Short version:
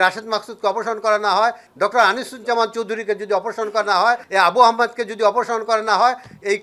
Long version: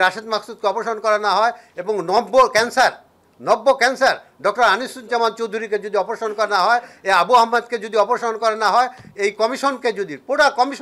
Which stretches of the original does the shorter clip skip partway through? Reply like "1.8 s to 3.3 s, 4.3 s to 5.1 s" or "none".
1.7 s to 4.3 s, 6.9 s to 7.0 s

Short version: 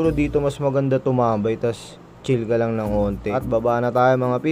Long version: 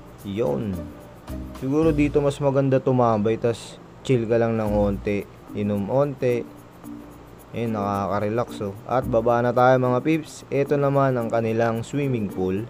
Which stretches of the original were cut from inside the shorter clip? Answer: 5.1 s to 8.9 s

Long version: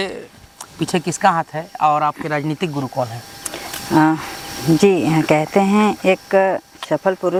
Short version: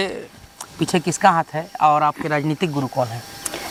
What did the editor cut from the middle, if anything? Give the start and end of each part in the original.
none

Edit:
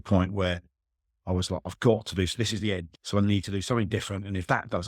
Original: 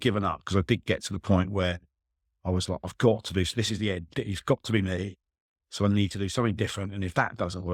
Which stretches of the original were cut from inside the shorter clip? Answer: 4.1 s to 5.6 s

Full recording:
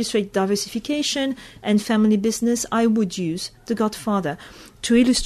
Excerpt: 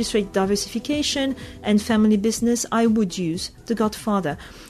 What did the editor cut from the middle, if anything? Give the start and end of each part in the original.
none

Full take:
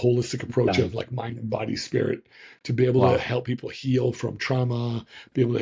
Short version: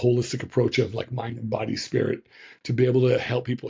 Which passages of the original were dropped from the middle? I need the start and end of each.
none

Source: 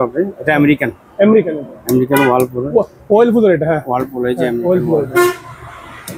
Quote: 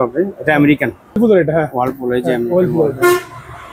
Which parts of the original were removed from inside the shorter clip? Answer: 1.2 s to 3.3 s

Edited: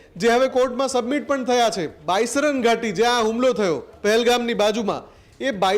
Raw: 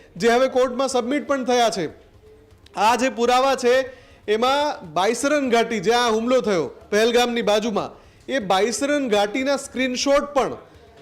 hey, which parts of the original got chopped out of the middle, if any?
2.0 s to 4.8 s

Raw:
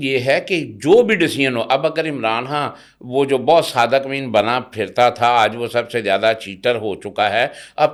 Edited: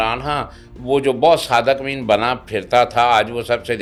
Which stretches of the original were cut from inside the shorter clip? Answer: none

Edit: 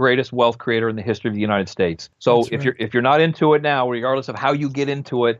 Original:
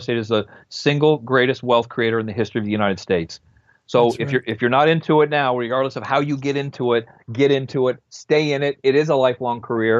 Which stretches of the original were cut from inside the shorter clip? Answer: 3.4 s to 3.7 s

